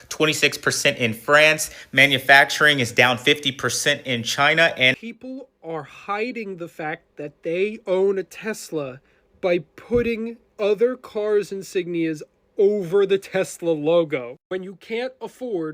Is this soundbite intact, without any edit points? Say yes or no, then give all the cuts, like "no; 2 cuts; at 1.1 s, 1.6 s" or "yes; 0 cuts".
no; 1 cut; at 5.0 s